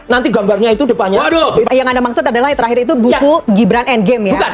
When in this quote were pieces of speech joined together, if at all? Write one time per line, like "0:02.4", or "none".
0:01.7